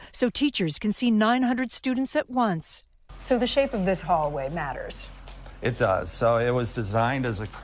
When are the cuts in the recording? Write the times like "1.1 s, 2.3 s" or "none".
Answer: none